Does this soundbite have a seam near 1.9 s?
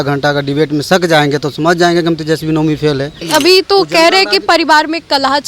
no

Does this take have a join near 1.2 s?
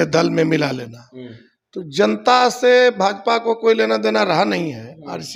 no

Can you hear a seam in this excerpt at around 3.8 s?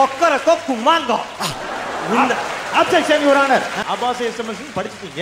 yes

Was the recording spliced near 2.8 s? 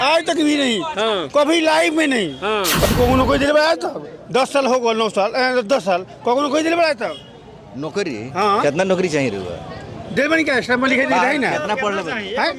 yes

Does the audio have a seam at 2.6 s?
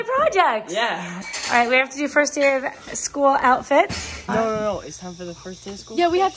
no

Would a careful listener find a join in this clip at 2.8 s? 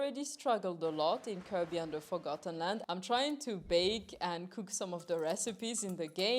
yes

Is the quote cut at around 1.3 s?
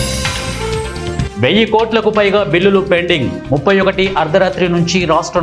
yes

